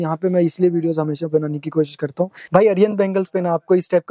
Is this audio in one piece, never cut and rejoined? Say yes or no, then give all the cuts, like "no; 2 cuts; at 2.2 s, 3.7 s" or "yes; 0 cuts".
no; 1 cut; at 2.4 s